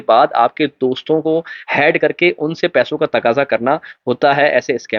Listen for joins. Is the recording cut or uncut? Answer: uncut